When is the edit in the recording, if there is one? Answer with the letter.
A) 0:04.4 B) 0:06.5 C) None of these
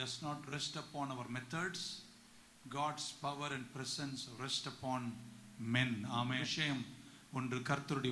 B